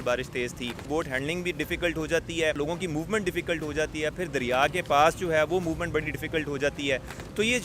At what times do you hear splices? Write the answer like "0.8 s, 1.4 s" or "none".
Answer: 0.9 s, 2.6 s